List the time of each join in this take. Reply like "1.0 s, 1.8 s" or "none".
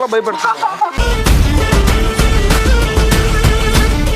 0.9 s